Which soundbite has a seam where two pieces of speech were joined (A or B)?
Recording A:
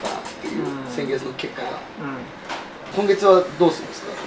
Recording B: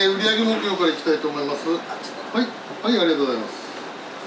B